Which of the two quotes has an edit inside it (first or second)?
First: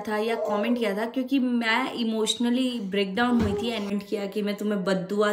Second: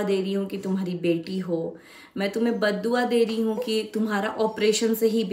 first